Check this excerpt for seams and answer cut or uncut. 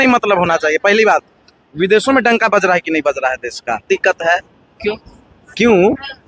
cut